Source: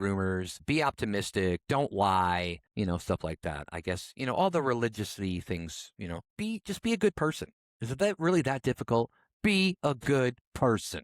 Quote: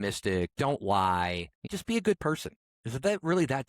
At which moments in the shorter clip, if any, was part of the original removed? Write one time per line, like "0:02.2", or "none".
0:01.6

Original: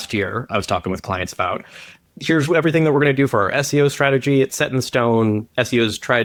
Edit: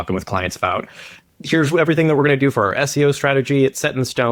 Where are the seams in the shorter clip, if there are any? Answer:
none

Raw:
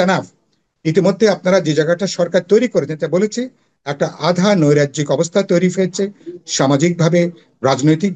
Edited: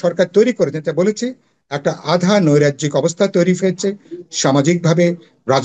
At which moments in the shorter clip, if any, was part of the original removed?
none

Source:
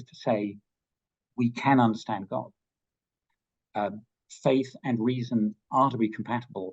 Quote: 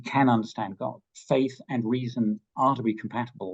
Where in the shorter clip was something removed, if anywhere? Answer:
0:01.1

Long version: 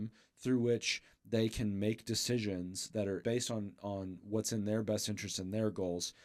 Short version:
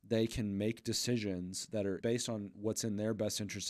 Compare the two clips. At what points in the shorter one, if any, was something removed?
0:02.5

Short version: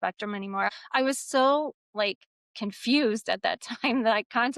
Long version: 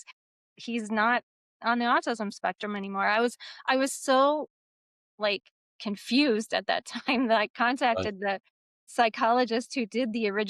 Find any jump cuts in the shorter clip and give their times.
0:00.7
0:01.8

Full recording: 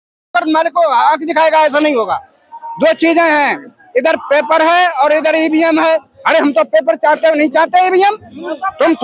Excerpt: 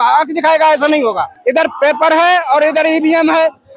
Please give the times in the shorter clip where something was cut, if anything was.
0:01.3

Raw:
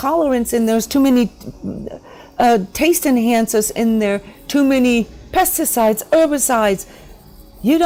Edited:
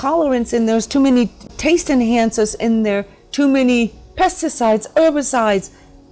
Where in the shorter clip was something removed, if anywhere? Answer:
0:01.5

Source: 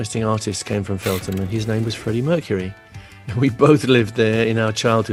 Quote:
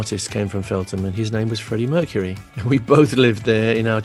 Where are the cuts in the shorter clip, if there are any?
0:02.5

